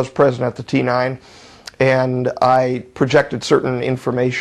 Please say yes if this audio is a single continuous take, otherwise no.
yes